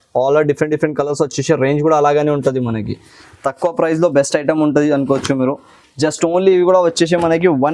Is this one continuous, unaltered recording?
yes; 0 cuts

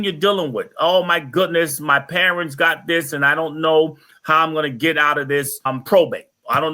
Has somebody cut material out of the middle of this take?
yes; 1 cut; at 5.7 s

